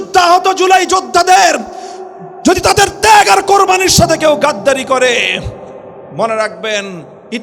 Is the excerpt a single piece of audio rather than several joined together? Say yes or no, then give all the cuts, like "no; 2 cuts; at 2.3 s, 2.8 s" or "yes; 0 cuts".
yes; 0 cuts